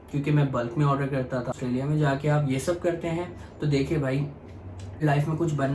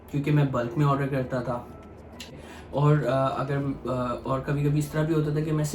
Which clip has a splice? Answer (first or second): first